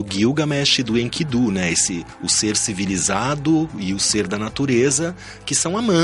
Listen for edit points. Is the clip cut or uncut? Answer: uncut